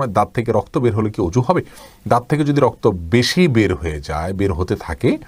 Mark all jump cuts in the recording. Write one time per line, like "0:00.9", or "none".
none